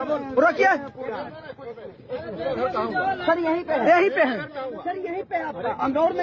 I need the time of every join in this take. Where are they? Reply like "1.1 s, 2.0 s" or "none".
none